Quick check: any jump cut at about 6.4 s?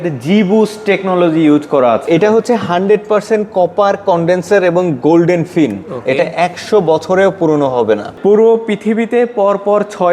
no; 2 cuts; at 2.0 s, 8.1 s

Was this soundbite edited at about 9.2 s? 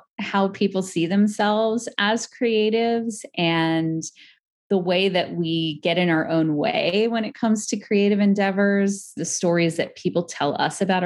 yes; 1 cut; at 9.2 s

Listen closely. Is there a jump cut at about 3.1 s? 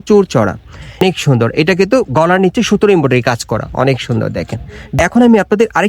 no; 2 cuts; at 1.0 s, 4.9 s

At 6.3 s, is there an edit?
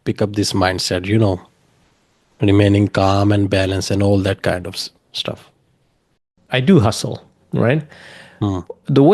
yes; 1 cut; at 6.3 s

